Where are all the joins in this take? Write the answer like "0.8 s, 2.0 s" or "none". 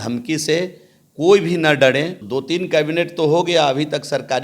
2.2 s